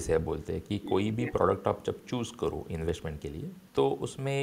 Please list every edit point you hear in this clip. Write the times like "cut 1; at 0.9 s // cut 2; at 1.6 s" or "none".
cut 1; at 3.5 s